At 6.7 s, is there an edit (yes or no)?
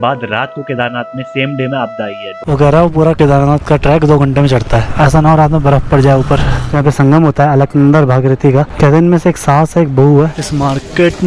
yes